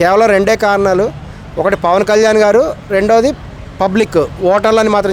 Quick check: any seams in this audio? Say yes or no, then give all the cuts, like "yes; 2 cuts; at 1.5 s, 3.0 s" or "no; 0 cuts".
no; 0 cuts